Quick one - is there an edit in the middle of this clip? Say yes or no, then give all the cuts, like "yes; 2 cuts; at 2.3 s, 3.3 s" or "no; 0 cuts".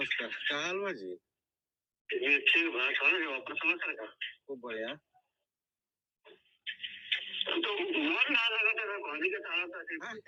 no; 0 cuts